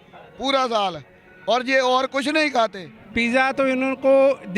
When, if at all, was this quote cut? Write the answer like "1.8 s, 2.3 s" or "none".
2.9 s